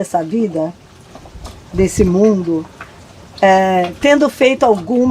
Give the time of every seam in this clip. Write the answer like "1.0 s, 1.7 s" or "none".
none